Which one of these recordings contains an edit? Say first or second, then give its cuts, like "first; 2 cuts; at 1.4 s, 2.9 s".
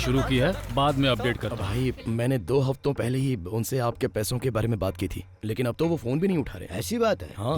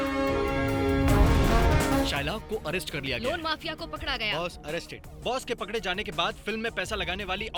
first; 1 cut; at 1.6 s